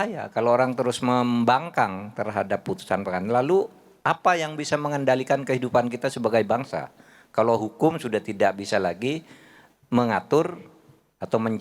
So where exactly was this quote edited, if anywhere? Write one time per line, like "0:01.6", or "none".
none